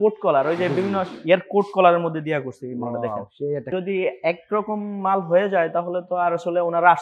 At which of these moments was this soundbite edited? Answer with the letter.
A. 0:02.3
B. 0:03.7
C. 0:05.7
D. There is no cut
B